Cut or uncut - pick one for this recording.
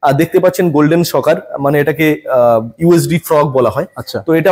uncut